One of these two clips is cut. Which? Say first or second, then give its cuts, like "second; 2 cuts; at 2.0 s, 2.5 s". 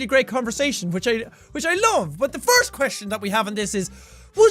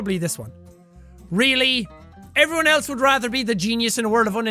first; 1 cut; at 3.6 s